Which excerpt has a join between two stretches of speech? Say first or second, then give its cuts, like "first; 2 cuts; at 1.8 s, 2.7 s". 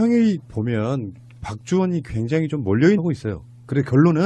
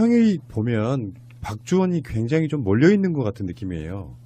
second; 1 cut; at 3.0 s